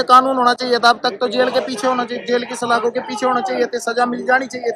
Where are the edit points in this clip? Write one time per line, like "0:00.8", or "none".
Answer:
none